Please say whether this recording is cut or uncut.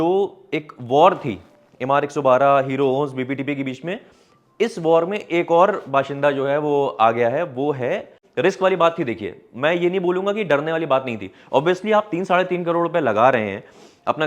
cut